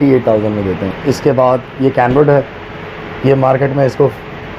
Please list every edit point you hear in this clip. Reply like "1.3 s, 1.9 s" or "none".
0.9 s